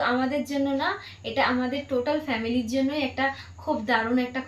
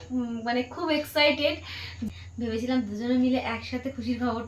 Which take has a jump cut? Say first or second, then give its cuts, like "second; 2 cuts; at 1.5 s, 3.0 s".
second; 1 cut; at 2.0 s